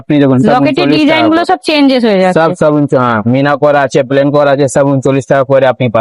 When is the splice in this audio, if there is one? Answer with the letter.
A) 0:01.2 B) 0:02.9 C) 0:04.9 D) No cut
D